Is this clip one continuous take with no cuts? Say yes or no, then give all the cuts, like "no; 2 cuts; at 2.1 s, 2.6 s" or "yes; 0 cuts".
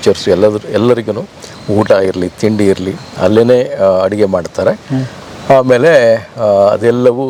yes; 0 cuts